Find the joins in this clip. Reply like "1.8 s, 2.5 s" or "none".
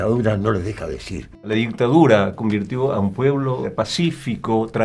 1.5 s, 3.6 s